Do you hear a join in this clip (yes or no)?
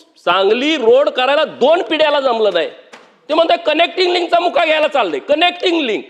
no